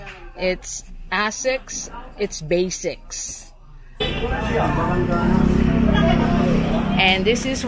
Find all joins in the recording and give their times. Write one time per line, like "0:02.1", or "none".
0:04.0